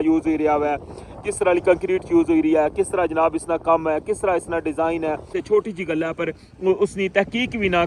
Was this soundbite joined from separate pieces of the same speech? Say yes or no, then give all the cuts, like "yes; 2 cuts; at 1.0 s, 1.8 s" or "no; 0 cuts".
yes; 1 cut; at 5.4 s